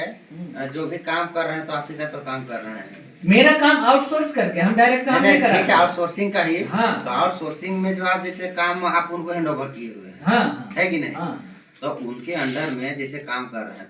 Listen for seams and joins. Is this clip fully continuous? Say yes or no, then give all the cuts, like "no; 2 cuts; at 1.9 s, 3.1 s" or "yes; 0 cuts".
yes; 0 cuts